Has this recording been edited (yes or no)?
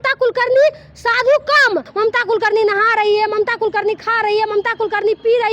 yes